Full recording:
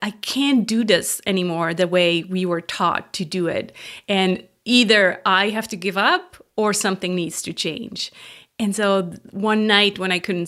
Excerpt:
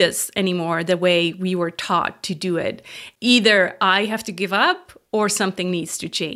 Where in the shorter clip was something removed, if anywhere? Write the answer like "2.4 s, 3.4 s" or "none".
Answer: 3.0 s

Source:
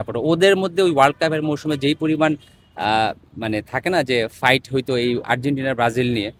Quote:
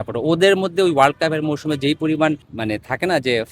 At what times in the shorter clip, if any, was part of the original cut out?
2.5 s

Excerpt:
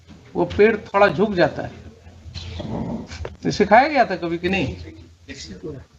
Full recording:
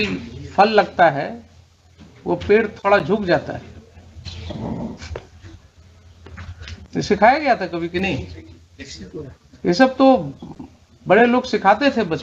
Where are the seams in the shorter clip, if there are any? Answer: 3.4 s

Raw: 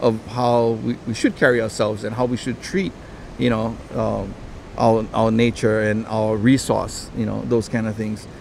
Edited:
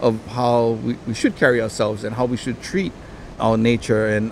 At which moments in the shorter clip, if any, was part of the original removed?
3.3 s

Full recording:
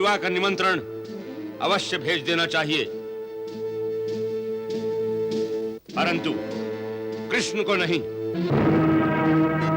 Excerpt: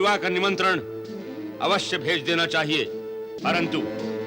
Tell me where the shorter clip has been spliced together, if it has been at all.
3.3 s

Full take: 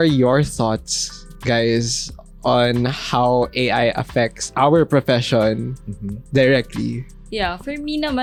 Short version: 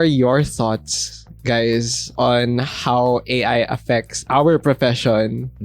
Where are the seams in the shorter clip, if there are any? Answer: 2.0 s

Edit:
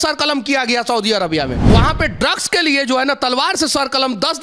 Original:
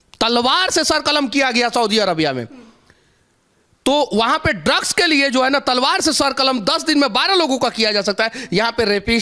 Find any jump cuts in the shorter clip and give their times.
1.7 s

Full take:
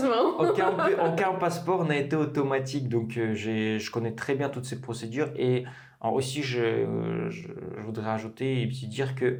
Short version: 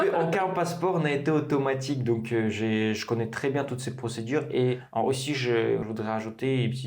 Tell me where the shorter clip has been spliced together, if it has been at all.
4.8 s, 5.8 s

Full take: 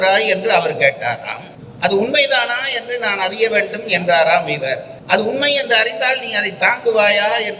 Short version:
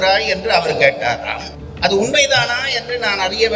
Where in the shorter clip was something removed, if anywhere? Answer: none

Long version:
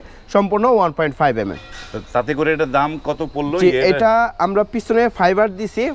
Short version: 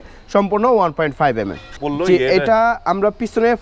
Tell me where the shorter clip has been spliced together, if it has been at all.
1.8 s

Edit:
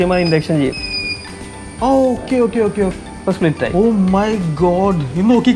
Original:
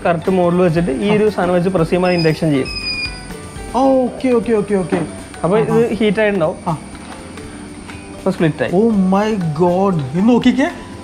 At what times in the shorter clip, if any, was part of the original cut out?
2.9 s

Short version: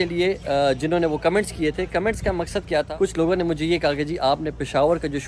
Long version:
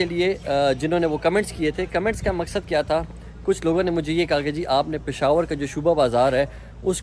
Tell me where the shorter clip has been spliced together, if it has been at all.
2.9 s

